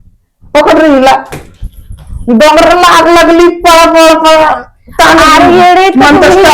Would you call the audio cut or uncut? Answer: uncut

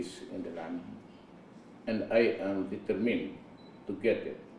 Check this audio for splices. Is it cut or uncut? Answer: cut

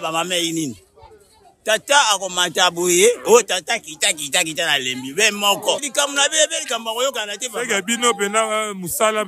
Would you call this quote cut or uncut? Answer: cut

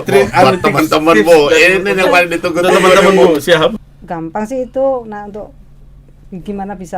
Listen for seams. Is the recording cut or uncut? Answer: cut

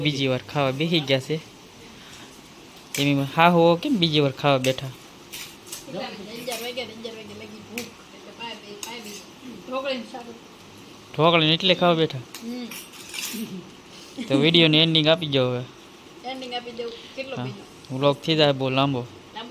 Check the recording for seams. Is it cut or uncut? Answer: uncut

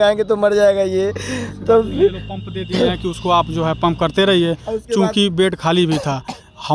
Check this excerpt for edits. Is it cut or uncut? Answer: uncut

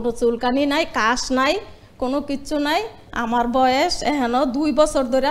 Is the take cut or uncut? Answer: uncut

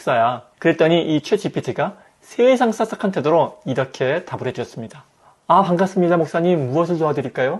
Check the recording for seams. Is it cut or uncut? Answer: uncut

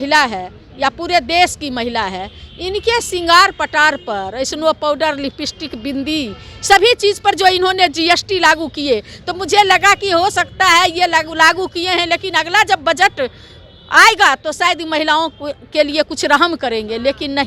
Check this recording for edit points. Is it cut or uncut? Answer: uncut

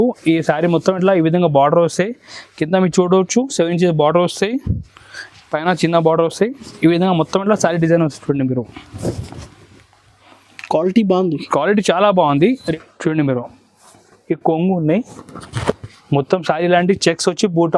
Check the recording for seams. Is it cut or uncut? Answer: cut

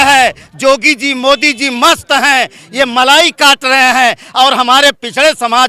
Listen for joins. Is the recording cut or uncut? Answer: uncut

